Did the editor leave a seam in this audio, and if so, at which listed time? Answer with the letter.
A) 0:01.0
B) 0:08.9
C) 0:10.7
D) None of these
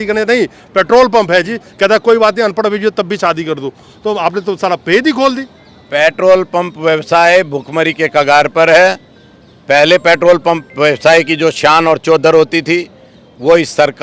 D